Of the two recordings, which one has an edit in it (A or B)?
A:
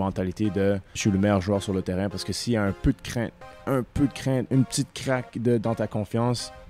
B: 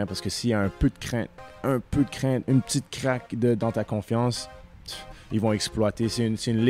A